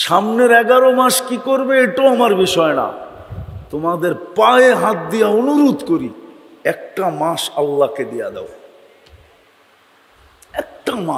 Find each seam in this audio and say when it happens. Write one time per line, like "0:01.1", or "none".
none